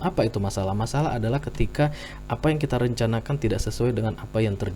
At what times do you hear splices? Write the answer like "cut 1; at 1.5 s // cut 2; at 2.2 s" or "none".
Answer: none